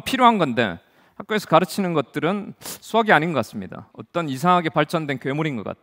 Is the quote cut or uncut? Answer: uncut